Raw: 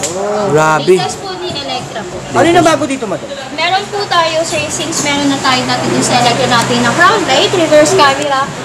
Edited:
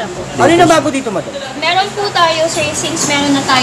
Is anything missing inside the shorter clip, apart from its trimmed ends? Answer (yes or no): no